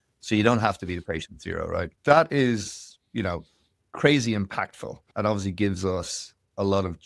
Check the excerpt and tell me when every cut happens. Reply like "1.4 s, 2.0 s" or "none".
1.9 s, 5.1 s